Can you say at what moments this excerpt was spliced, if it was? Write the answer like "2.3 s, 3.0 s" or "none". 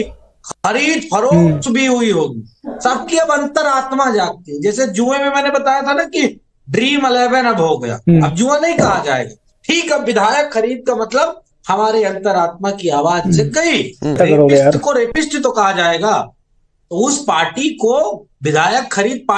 14.2 s

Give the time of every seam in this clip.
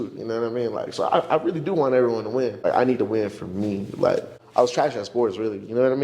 2.7 s, 4.4 s

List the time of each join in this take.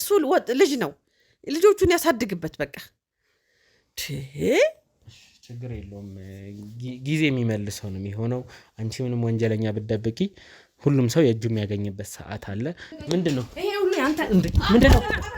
12.9 s

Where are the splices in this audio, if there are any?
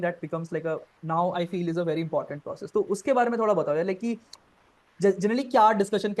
none

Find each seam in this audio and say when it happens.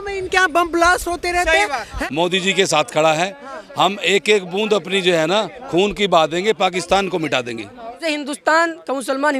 1.9 s, 8.0 s

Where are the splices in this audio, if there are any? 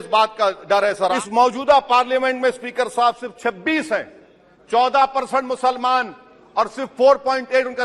1.1 s

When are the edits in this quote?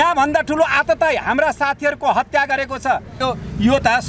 3.2 s

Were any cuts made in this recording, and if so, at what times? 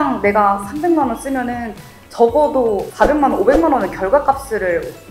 none

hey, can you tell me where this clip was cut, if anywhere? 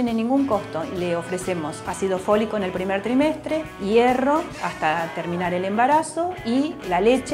0.9 s, 4.6 s

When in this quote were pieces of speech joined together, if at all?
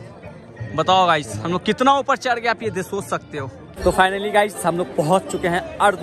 3.8 s

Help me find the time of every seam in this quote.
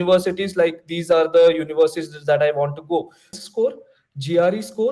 3.3 s

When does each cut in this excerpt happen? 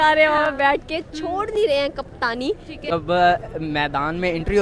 2.9 s

